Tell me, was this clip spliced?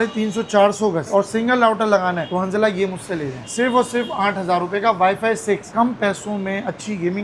yes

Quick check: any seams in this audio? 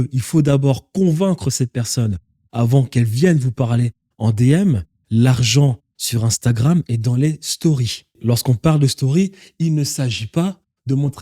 yes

